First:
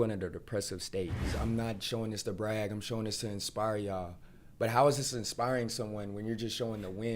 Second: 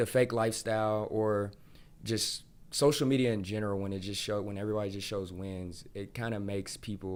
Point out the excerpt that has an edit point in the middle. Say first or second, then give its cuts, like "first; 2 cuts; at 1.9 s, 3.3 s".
first; 1 cut; at 1.3 s